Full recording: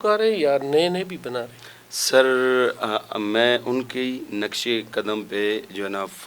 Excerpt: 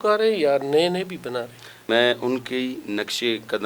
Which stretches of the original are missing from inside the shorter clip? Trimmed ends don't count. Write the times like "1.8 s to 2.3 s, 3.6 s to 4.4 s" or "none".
1.7 s to 3.2 s